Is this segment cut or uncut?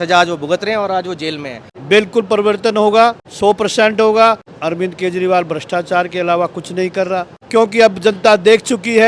cut